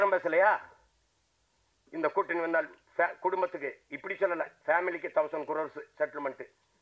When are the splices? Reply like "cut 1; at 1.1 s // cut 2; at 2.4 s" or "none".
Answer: none